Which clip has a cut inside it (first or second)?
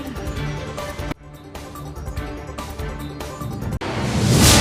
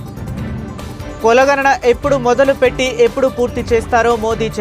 second